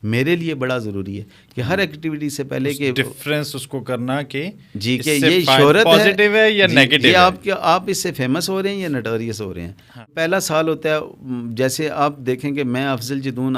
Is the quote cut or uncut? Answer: cut